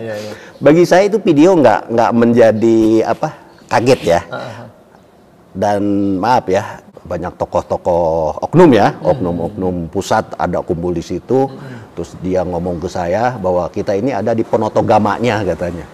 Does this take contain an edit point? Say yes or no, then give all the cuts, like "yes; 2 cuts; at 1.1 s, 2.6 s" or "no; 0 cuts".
yes; 1 cut; at 6.9 s